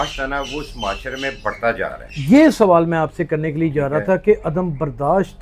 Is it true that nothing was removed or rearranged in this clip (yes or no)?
yes